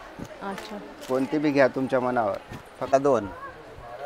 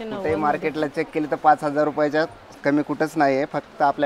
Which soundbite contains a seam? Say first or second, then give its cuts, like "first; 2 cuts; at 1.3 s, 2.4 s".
first; 1 cut; at 2.9 s